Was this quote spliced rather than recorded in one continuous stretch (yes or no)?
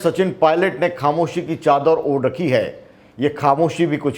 no